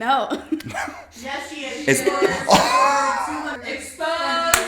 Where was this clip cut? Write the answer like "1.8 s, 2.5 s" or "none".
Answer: 3.6 s